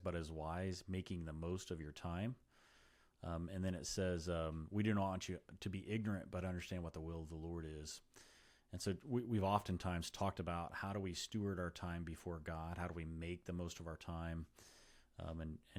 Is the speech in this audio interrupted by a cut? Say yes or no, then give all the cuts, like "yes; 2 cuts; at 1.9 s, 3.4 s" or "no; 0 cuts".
no; 0 cuts